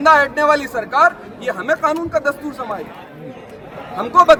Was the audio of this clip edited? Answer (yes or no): no